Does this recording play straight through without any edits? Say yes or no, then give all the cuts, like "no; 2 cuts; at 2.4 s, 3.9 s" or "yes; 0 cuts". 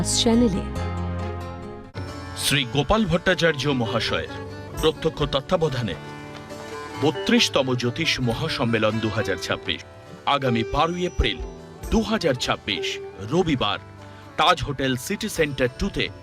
no; 1 cut; at 1.9 s